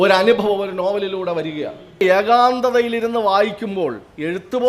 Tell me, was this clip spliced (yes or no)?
yes